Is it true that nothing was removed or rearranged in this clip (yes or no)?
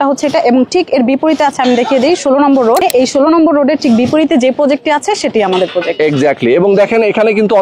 no